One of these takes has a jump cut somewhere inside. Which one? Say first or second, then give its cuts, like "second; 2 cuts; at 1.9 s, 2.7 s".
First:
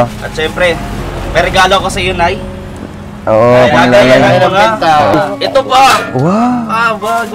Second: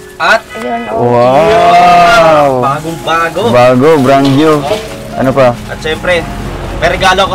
first; 1 cut; at 5.1 s